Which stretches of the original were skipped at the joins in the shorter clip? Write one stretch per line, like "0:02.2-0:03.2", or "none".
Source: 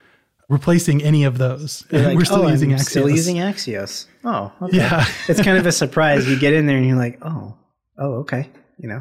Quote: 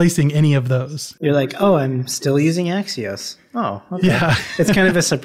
none